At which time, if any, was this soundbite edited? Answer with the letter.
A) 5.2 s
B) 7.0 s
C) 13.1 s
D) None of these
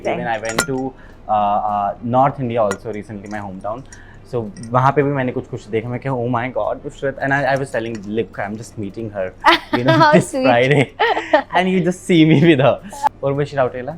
C